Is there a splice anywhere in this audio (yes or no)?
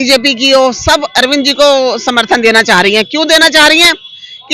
no